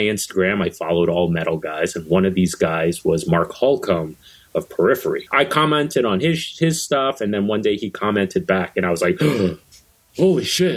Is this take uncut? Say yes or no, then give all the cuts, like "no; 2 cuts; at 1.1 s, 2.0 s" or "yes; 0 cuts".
no; 1 cut; at 5.2 s